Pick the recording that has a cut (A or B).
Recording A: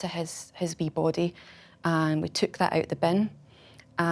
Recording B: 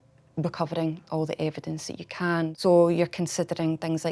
B